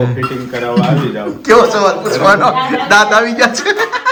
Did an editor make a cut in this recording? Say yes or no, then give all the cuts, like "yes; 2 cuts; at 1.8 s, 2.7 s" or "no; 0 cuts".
no; 0 cuts